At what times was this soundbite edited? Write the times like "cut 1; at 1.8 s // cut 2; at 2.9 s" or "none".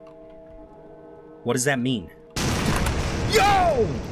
cut 1; at 2.2 s